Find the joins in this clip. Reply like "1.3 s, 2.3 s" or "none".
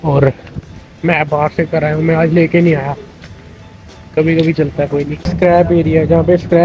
5.3 s